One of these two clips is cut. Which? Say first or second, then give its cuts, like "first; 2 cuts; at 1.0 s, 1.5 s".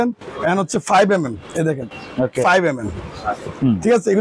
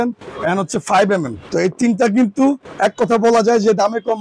second; 2 cuts; at 1.4 s, 2.7 s